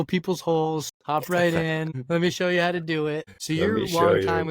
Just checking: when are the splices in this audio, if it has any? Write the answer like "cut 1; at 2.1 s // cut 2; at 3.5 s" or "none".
cut 1; at 0.9 s // cut 2; at 2.0 s // cut 3; at 3.3 s